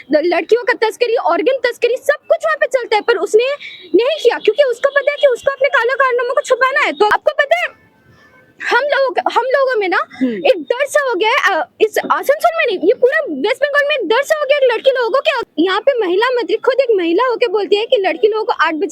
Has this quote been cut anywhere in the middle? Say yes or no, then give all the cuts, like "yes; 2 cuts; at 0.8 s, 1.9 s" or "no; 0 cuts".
yes; 2 cuts; at 7.1 s, 15.4 s